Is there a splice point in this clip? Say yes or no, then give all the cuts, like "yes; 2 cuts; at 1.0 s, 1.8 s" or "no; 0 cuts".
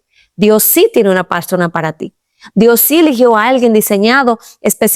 no; 0 cuts